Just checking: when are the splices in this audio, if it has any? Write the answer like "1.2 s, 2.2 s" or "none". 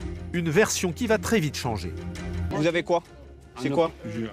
2.5 s